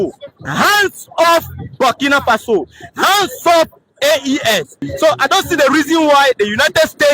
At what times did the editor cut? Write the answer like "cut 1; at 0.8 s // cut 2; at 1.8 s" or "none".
cut 1; at 4.8 s